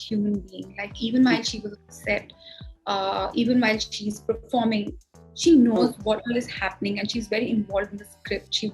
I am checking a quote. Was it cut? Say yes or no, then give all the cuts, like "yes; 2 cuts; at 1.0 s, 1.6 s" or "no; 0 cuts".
no; 0 cuts